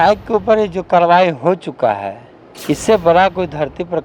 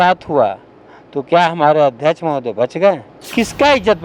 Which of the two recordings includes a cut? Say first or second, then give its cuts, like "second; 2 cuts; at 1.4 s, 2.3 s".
second; 1 cut; at 3.1 s